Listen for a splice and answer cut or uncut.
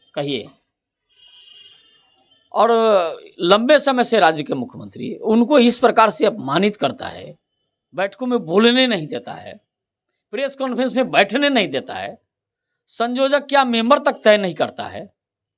uncut